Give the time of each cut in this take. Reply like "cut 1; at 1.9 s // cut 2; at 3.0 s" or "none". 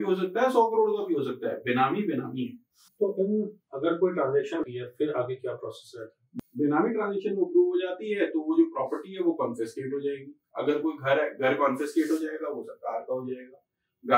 cut 1; at 4.6 s